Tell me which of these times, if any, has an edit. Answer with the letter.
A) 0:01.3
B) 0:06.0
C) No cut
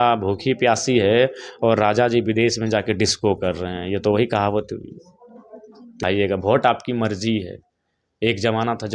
B